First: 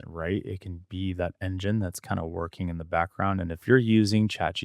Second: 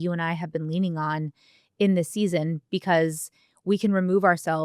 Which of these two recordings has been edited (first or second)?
first